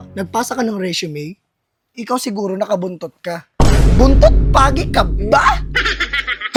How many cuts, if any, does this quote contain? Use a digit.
0